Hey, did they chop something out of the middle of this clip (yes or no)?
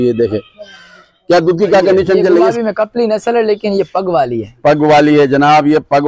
yes